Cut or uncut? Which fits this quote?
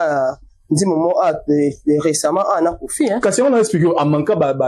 uncut